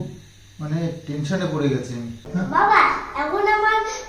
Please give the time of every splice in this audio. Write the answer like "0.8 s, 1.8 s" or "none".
2.2 s